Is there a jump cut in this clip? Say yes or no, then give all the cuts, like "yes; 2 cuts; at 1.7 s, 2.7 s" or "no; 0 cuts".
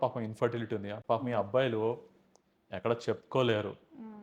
no; 0 cuts